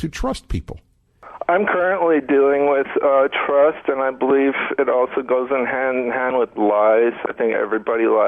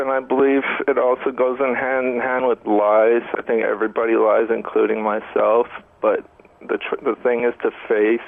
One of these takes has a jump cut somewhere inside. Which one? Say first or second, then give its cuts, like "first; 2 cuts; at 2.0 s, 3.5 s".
first; 1 cut; at 1.2 s